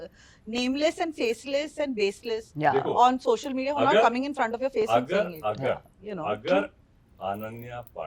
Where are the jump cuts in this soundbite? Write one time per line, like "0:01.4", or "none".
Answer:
none